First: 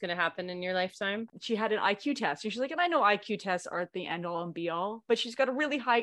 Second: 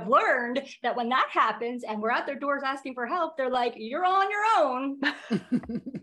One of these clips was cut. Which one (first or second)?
first